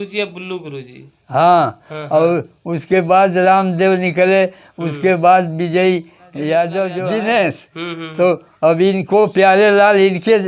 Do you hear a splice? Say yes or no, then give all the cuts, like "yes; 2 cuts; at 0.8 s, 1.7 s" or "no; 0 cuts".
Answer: yes; 1 cut; at 7.0 s